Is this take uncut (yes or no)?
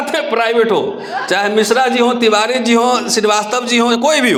yes